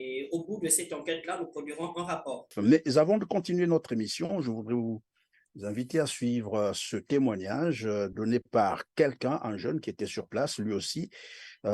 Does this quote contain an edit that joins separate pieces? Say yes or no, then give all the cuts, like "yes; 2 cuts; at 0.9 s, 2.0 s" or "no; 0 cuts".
yes; 1 cut; at 2.5 s